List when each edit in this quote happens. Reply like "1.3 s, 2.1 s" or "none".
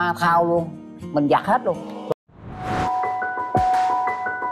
none